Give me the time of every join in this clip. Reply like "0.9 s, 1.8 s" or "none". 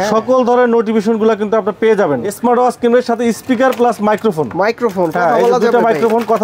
2.3 s